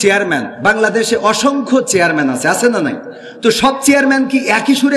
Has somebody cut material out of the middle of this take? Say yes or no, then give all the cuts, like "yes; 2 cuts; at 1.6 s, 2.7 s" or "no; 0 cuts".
no; 0 cuts